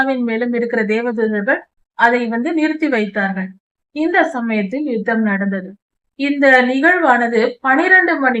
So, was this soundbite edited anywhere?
yes; 1 cut; at 1.6 s

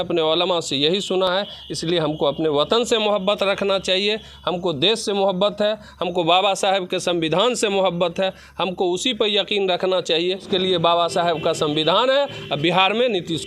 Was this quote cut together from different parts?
no; 0 cuts

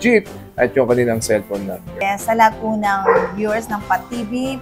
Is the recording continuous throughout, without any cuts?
no; 1 cut; at 2.0 s

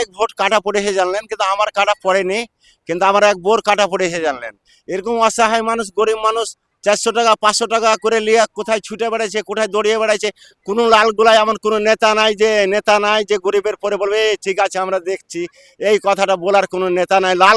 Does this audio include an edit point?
no; 0 cuts

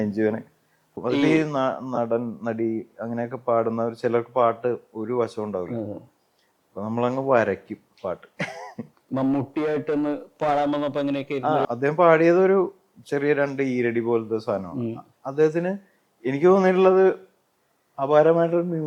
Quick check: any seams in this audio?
yes; 2 cuts; at 1.0 s, 9.0 s

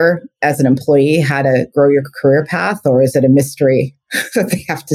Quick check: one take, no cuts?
yes; 0 cuts

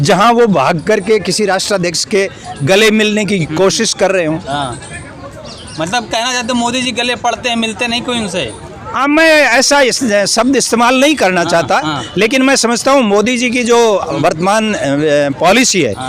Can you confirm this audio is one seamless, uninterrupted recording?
yes; 0 cuts

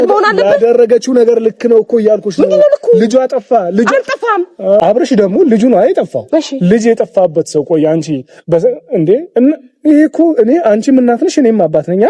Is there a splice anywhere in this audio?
yes; 1 cut; at 4.8 s

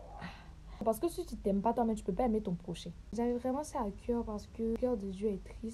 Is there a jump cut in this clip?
yes; 3 cuts; at 0.8 s, 3.1 s, 4.8 s

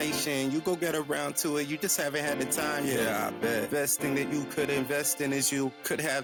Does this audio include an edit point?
no; 0 cuts

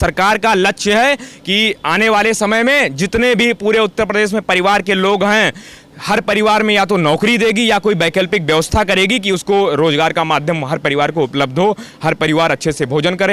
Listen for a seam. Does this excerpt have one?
no; 0 cuts

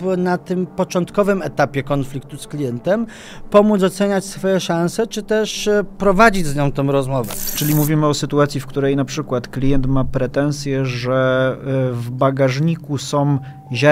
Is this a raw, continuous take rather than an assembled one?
no; 1 cut; at 7.6 s

